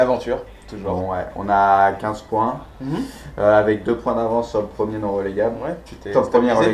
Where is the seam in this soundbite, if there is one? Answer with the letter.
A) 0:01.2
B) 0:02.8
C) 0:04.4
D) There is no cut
C